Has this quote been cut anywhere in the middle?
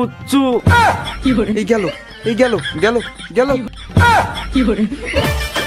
yes; 1 cut; at 3.8 s

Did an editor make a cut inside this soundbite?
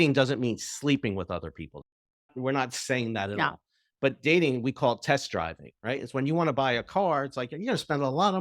yes; 1 cut; at 1.6 s

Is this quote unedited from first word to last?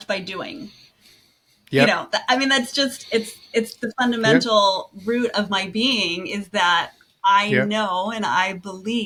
yes; 0 cuts

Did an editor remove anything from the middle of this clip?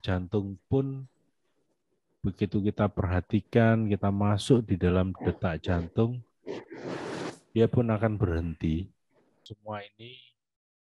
yes; 1 cut; at 9.5 s

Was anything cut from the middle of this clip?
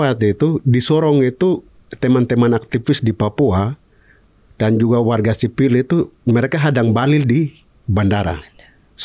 no; 0 cuts

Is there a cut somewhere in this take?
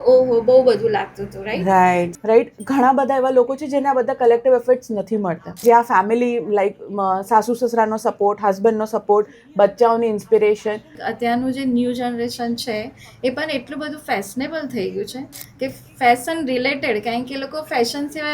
yes; 3 cuts; at 2.1 s, 5.6 s, 11.0 s

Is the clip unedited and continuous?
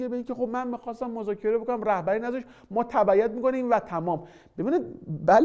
yes; 0 cuts

